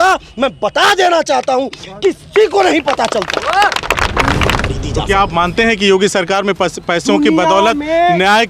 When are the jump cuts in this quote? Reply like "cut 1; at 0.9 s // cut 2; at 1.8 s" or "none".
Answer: cut 1; at 4.6 s